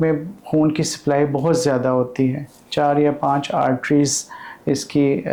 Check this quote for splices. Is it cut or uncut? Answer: uncut